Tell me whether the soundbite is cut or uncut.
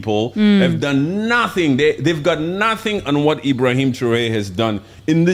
uncut